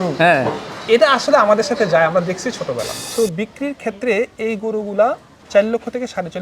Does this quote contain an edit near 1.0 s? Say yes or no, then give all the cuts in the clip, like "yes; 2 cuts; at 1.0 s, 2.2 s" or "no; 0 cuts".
no; 2 cuts; at 3.0 s, 5.4 s